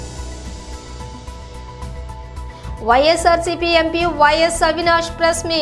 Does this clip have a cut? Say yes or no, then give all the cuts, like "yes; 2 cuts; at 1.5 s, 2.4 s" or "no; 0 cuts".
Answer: yes; 1 cut; at 1.3 s